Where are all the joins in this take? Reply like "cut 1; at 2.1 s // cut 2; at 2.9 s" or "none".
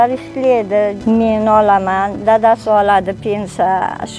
cut 1; at 1.0 s